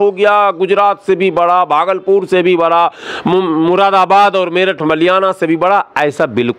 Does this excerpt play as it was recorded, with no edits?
yes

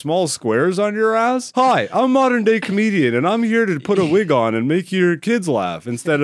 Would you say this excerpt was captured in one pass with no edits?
no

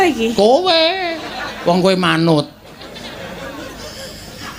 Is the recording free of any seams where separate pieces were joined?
yes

